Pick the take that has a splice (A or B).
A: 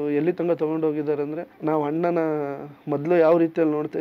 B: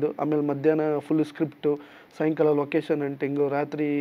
A